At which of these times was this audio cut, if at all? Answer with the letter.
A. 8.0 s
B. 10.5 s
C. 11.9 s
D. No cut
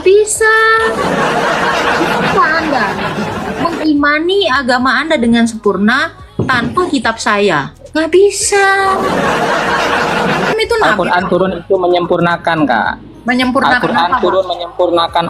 B